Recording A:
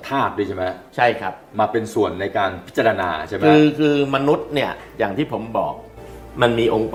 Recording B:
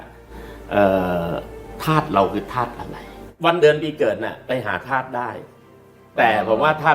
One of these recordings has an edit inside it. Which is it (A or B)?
B